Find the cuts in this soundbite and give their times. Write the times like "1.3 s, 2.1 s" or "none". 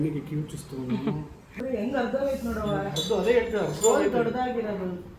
1.6 s

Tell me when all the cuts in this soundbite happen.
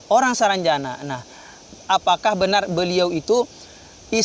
1.8 s

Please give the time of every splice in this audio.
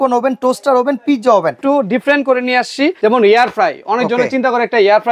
1.6 s, 3.0 s

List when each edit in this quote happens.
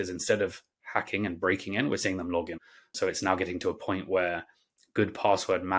2.9 s

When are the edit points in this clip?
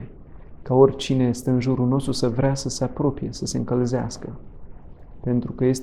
none

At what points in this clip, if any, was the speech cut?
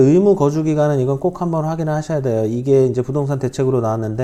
none

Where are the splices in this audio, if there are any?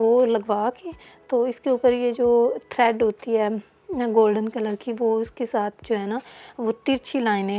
none

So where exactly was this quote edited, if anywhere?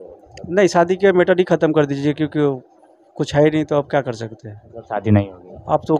none

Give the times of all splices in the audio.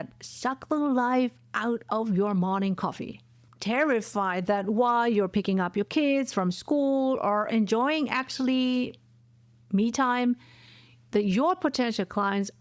3.4 s

